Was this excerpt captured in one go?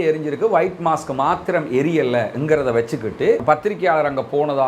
yes; 0 cuts

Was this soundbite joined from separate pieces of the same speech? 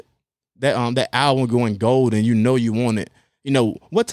no; 0 cuts

